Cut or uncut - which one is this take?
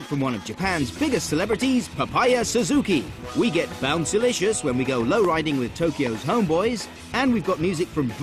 cut